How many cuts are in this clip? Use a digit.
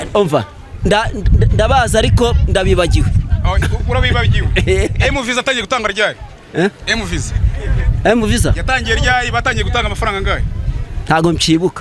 0